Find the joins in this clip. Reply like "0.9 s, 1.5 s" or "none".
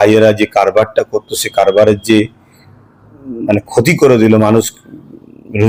none